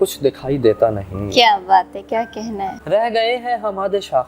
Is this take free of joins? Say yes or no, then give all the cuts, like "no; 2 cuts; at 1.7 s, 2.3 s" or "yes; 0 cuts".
no; 1 cut; at 2.7 s